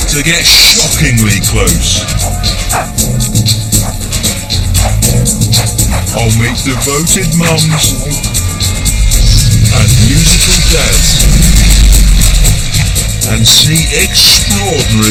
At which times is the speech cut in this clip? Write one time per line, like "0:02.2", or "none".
none